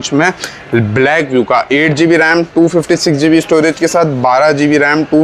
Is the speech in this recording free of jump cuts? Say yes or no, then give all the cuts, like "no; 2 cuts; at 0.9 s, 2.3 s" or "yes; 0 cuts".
yes; 0 cuts